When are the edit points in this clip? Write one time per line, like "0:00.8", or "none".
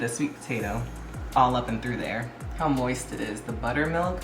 0:02.4